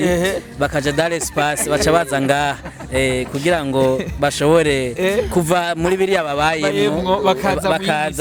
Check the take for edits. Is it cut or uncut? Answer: uncut